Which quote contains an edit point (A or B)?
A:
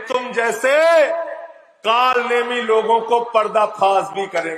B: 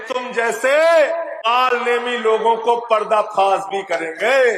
B